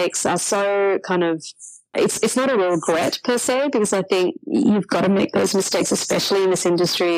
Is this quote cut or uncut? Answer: cut